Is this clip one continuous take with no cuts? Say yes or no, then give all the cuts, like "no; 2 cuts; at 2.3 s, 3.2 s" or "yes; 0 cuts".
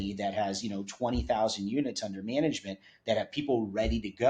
yes; 0 cuts